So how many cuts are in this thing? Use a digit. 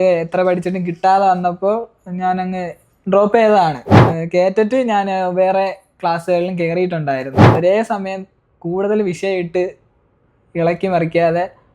2